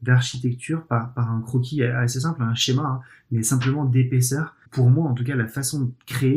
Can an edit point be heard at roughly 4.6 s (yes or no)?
yes